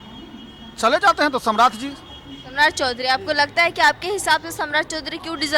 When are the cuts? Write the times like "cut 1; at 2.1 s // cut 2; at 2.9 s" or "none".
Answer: none